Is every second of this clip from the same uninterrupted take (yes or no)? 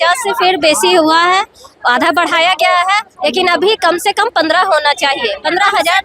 yes